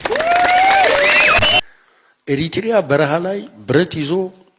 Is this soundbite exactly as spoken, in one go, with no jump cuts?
no; 1 cut; at 1.6 s

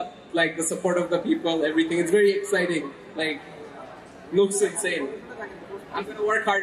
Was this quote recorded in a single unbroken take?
yes; 0 cuts

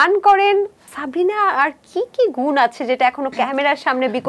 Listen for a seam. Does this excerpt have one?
yes; 1 cut; at 1.0 s

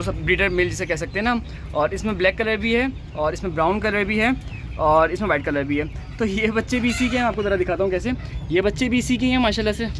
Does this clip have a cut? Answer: no; 0 cuts

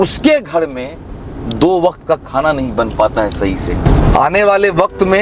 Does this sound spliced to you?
no; 0 cuts

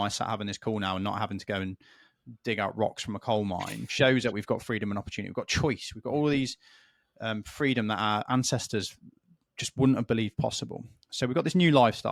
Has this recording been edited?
no; 0 cuts

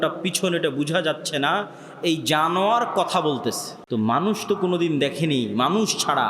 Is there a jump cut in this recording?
yes; 1 cut; at 3.7 s

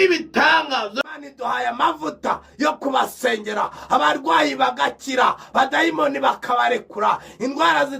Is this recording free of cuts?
no; 1 cut; at 1.0 s

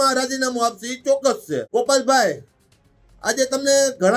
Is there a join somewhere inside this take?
yes; 1 cut; at 1.7 s

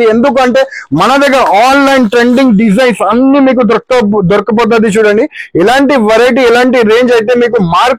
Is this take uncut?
yes; 0 cuts

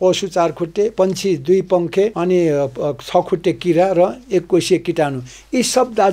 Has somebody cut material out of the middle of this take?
yes; 2 cuts; at 0.9 s, 2.1 s

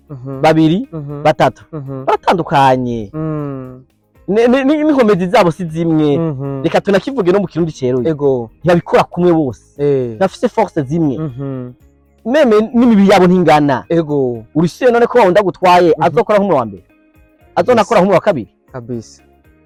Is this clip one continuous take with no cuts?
yes; 0 cuts

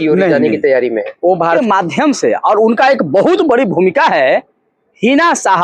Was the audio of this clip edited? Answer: yes; 1 cut; at 1.6 s

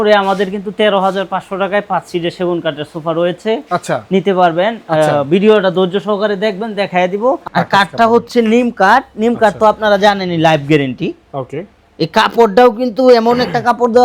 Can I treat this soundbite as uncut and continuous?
no; 1 cut; at 7.4 s

